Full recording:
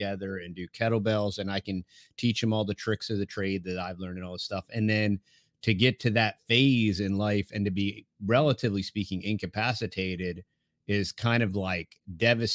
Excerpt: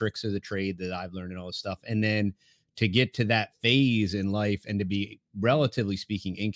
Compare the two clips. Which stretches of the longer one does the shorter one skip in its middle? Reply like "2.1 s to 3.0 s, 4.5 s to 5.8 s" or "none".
none